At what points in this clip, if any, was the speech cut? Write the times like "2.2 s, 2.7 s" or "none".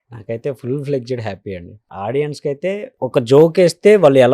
1.7 s, 2.9 s